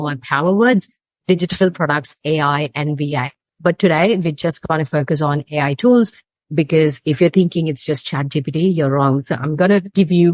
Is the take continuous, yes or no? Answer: no